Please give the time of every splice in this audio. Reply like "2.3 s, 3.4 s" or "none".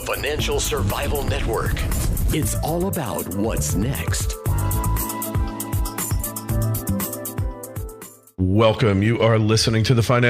8.2 s